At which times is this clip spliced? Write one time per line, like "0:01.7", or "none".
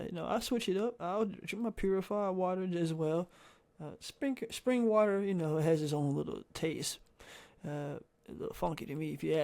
none

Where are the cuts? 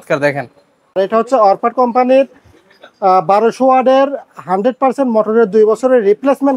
0:01.0

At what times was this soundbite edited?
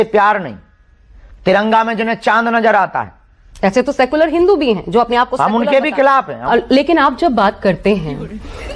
0:06.4

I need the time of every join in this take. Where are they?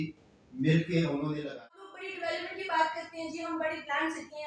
0:01.6

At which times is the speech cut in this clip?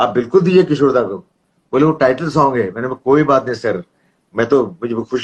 none

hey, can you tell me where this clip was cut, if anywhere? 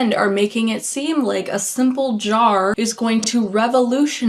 0:02.8

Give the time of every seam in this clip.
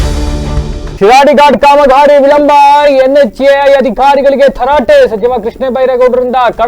0:00.9

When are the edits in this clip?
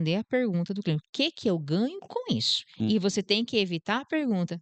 none

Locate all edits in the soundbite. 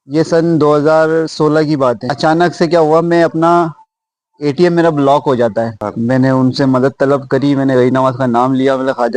0:02.1
0:05.8

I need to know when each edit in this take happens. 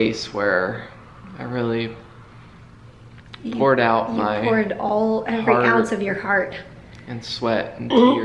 none

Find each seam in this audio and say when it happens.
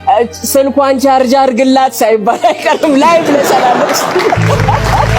0:04.2

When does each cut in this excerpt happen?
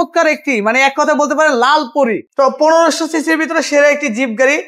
0:02.2

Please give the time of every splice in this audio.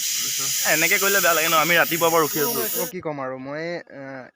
0:02.8

